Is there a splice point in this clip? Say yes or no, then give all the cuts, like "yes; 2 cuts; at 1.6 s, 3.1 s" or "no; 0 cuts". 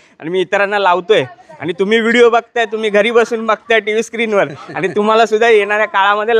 no; 0 cuts